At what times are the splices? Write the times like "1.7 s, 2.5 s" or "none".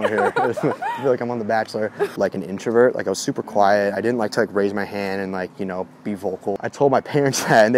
2.1 s, 6.5 s